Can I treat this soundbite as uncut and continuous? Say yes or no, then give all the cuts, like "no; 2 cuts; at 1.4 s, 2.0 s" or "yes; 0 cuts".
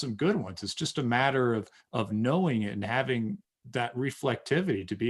yes; 0 cuts